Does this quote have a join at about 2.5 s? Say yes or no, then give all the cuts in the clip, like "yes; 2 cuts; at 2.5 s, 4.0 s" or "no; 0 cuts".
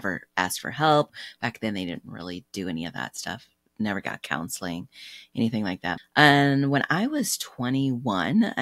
no; 2 cuts; at 1.1 s, 6.0 s